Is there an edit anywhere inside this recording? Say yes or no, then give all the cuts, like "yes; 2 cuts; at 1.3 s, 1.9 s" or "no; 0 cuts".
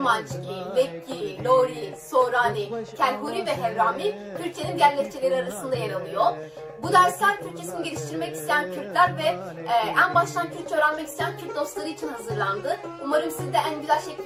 no; 0 cuts